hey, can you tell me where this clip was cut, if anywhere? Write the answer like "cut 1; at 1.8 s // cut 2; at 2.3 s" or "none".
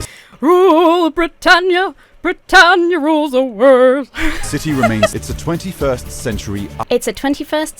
cut 1; at 5.1 s // cut 2; at 6.8 s